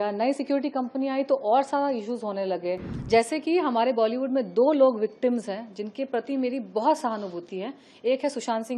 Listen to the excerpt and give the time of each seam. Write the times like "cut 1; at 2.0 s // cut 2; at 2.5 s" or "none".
cut 1; at 2.9 s